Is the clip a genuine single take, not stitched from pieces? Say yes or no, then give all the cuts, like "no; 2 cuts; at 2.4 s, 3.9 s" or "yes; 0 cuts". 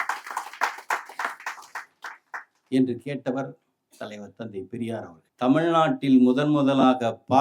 no; 1 cut; at 5.2 s